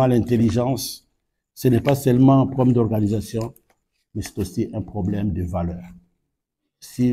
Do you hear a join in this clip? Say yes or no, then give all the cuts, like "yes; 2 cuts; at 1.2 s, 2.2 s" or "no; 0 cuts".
no; 0 cuts